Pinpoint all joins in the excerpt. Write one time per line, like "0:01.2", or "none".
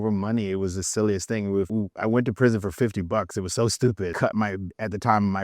0:01.7
0:04.1